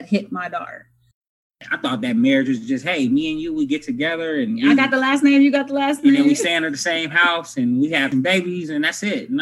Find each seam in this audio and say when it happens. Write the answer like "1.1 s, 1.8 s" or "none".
1.3 s, 8.1 s